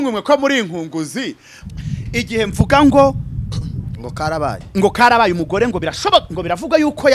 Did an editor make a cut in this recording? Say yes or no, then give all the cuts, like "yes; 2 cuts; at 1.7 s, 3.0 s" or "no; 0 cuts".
yes; 1 cut; at 1.5 s